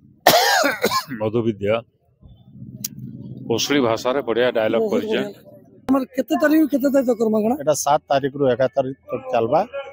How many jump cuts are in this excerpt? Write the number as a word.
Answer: one